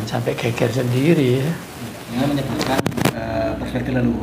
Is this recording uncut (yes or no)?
no